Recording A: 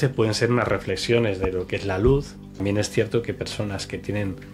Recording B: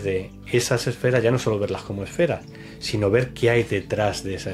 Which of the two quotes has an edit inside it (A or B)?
A